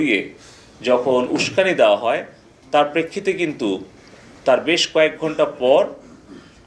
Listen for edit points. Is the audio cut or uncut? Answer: uncut